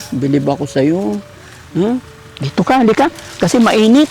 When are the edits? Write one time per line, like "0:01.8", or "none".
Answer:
none